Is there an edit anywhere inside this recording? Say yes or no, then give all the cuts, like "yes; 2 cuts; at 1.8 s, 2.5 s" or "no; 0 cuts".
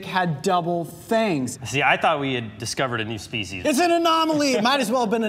yes; 2 cuts; at 1.5 s, 3.5 s